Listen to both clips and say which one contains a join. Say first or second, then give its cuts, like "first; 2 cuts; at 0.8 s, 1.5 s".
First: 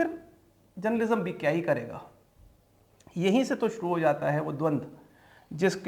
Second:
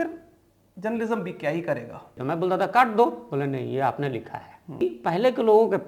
second; 2 cuts; at 2.2 s, 4.8 s